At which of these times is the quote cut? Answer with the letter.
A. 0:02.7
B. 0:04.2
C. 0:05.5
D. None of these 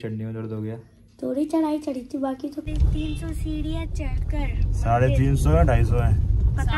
A